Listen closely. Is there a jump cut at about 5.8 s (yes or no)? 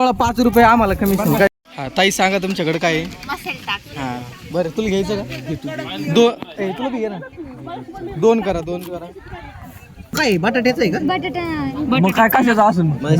no